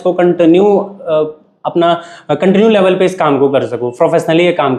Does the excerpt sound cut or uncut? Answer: uncut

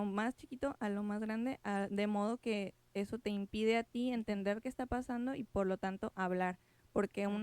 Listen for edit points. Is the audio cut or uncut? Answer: uncut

